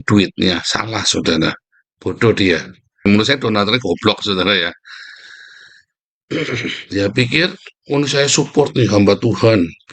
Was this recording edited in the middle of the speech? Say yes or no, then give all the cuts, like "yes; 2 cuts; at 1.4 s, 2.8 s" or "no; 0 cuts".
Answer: yes; 1 cut; at 3.0 s